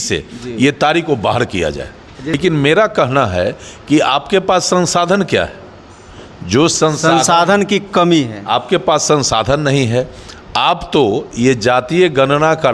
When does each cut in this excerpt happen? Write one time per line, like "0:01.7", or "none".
0:02.4